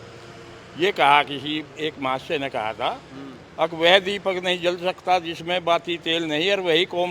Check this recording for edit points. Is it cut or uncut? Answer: uncut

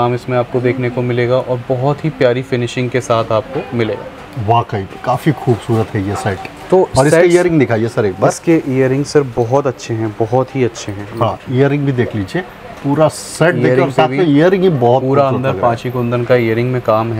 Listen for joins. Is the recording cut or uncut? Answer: uncut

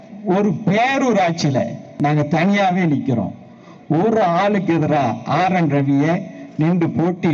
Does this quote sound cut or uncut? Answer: cut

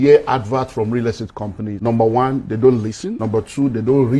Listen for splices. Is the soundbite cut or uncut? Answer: cut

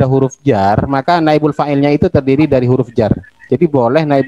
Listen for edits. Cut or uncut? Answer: uncut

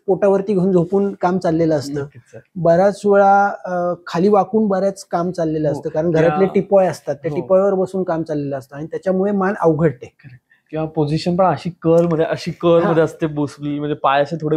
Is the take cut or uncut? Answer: uncut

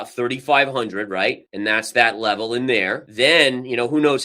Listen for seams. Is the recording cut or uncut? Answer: cut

